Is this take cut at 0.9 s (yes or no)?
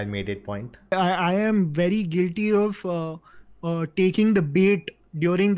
yes